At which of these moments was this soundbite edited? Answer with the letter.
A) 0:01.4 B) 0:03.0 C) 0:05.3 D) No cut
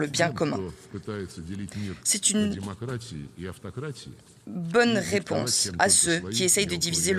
D